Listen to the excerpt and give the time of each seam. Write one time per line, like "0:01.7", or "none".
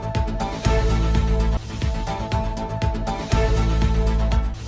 none